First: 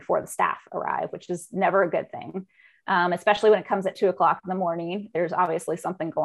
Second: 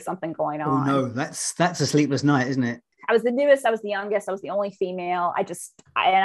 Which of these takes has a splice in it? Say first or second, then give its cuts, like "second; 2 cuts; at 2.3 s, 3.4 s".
second; 1 cut; at 2.9 s